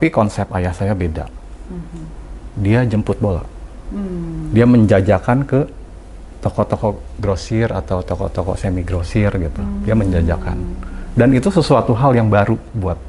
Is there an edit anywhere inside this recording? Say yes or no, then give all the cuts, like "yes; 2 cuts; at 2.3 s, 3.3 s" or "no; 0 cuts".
no; 0 cuts